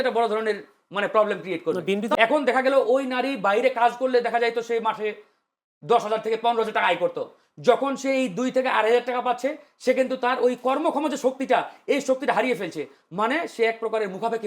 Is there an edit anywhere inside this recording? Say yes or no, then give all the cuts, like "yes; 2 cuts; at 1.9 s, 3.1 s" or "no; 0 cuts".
yes; 1 cut; at 2.1 s